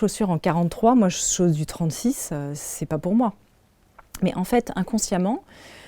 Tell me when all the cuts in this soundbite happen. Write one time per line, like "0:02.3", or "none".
none